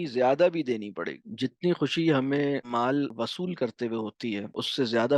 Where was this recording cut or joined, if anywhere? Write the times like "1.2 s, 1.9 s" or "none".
1.2 s